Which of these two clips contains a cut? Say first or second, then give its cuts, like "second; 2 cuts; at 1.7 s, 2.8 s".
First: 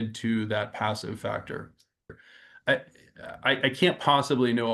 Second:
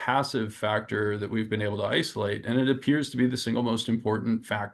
first; 1 cut; at 2.2 s